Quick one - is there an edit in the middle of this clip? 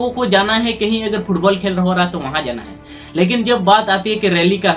no; 0 cuts

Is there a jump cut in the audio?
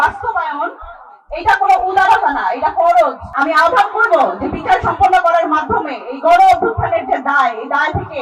yes; 1 cut; at 3.2 s

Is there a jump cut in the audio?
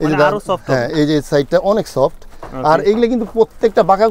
no; 0 cuts

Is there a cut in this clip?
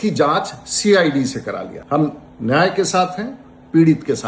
yes; 1 cut; at 1.7 s

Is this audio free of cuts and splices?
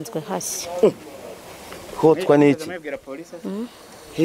yes; 0 cuts

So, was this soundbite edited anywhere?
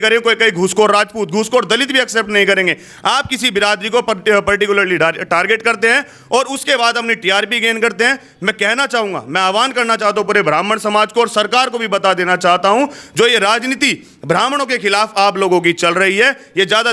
no; 0 cuts

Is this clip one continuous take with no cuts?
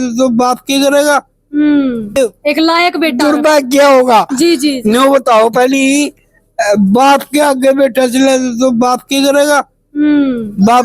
yes; 0 cuts

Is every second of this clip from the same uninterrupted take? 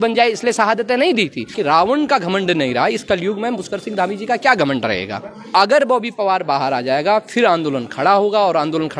no; 2 cuts; at 1.6 s, 5.4 s

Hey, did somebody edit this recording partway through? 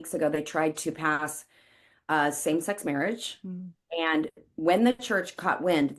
no; 0 cuts

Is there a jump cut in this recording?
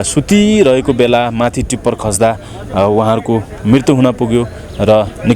no; 0 cuts

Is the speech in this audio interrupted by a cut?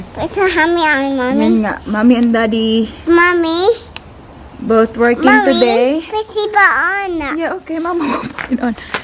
no; 0 cuts

